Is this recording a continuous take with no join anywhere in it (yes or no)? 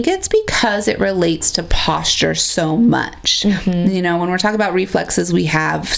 yes